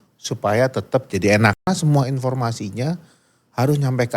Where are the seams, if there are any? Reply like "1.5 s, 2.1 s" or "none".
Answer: 1.6 s